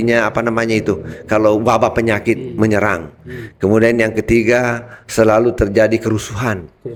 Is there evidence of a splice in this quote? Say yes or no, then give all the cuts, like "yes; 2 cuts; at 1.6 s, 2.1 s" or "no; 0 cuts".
no; 0 cuts